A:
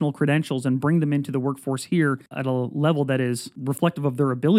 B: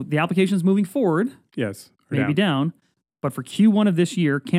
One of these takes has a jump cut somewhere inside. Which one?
A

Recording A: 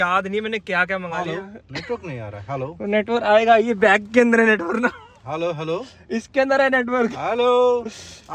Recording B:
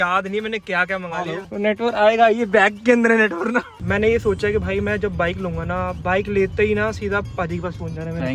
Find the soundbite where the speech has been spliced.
B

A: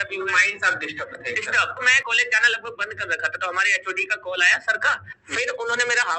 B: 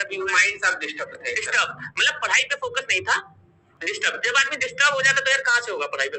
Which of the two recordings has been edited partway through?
A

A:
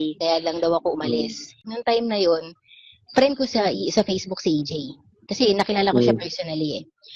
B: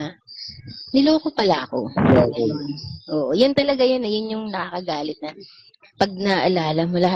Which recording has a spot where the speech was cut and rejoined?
A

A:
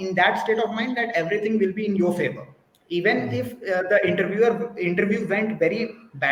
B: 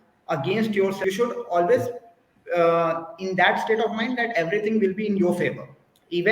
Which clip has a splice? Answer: B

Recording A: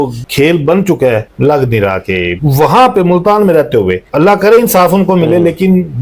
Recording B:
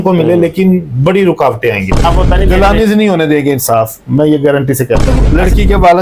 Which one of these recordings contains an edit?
B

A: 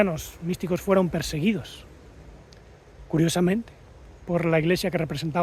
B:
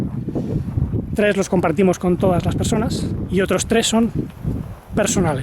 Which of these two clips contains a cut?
B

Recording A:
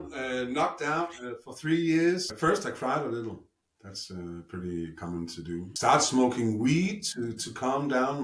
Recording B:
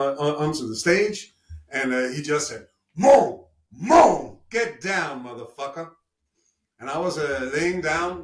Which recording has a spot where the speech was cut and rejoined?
A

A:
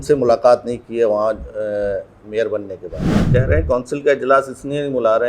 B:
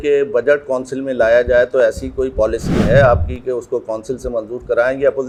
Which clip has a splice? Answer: A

